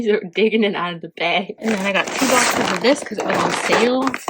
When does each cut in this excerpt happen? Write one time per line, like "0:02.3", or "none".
0:01.6